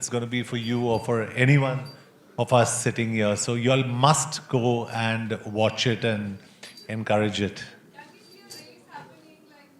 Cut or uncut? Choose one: uncut